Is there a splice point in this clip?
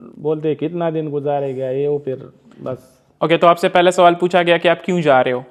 no; 0 cuts

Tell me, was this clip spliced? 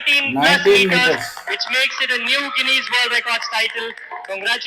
no; 0 cuts

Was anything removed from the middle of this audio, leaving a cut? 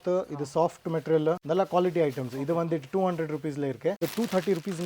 yes; 2 cuts; at 1.4 s, 4.0 s

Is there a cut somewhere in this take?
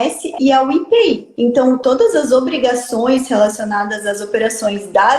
yes; 1 cut; at 1.7 s

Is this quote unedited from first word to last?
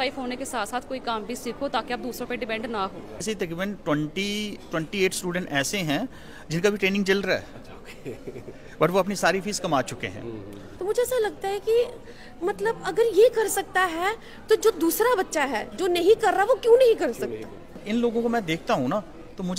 no; 3 cuts; at 3.2 s, 10.6 s, 17.7 s

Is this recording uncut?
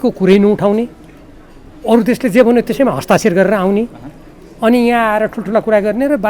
yes; 0 cuts

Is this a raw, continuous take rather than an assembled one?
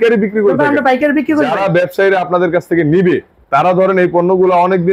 yes; 0 cuts

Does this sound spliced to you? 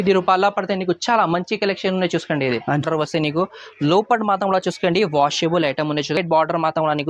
yes; 2 cuts; at 2.8 s, 6.2 s

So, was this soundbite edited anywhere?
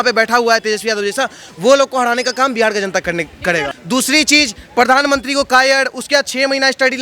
yes; 1 cut; at 3.7 s

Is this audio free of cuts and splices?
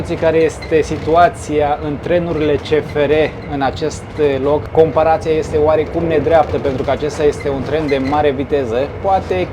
yes; 0 cuts

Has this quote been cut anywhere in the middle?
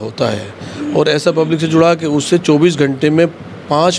no; 0 cuts

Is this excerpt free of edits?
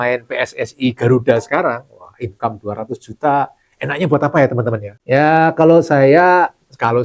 yes; 0 cuts

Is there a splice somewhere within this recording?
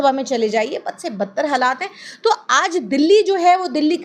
yes; 1 cut; at 2.0 s

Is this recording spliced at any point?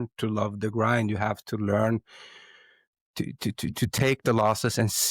no; 0 cuts

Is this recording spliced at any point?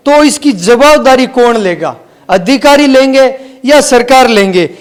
no; 0 cuts

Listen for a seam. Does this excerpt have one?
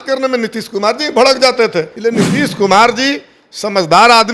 yes; 1 cut; at 1.9 s

